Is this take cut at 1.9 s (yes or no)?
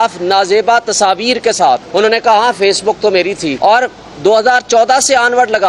yes